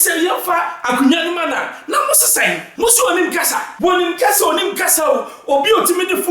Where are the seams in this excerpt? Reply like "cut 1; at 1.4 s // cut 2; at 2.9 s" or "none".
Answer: cut 1; at 2.7 s // cut 2; at 3.6 s